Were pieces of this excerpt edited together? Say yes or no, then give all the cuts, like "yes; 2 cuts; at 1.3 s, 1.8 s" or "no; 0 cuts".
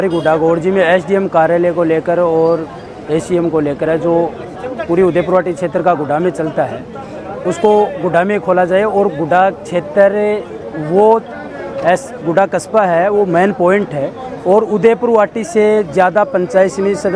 no; 0 cuts